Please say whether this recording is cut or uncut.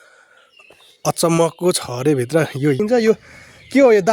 cut